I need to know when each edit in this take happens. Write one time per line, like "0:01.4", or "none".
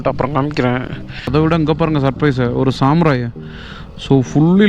0:01.3